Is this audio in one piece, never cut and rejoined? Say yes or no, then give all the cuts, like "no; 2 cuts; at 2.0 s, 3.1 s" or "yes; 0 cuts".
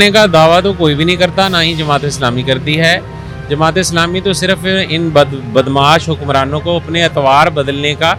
yes; 0 cuts